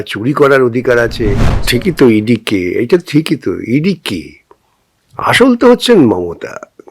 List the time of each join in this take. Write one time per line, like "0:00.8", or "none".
0:01.5